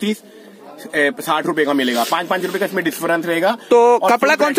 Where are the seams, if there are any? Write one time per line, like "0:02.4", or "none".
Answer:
none